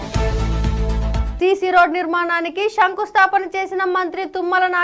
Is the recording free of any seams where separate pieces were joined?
no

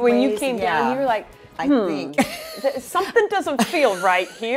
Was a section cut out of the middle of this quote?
no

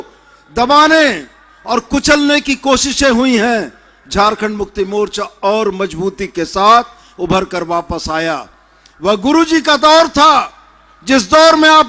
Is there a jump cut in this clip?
no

